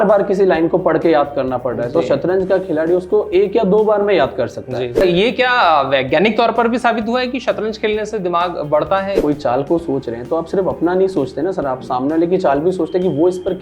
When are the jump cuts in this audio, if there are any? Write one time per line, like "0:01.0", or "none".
0:04.9
0:09.2